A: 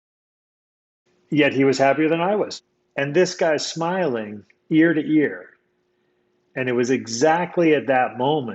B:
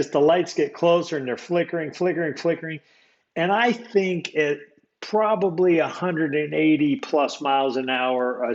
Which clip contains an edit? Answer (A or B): A